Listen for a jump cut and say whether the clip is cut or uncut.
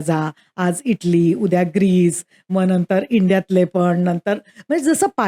uncut